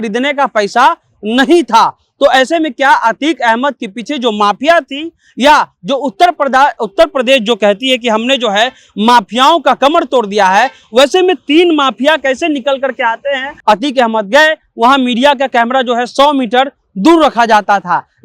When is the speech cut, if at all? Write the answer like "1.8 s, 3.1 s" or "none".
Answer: 13.5 s